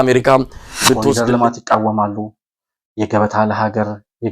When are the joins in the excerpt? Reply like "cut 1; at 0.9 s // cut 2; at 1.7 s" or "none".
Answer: cut 1; at 1.1 s